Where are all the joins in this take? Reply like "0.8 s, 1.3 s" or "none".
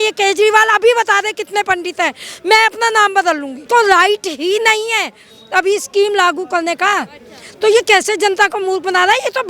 3.6 s